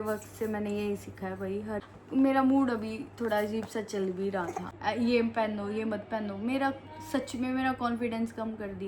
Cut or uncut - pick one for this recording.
cut